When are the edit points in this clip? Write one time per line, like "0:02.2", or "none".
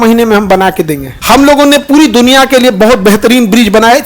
0:01.1